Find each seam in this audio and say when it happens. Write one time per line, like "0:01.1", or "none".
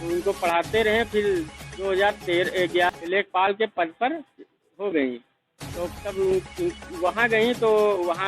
0:02.9